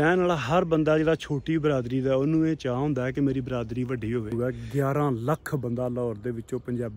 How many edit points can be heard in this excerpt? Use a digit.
1